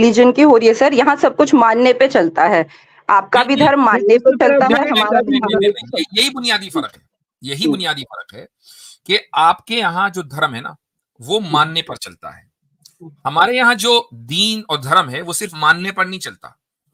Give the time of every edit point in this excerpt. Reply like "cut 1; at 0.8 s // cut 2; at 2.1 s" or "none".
none